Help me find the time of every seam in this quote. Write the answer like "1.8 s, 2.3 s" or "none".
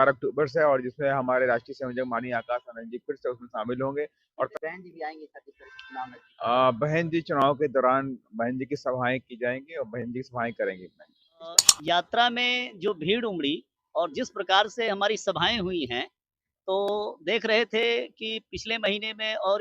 4.5 s, 11.7 s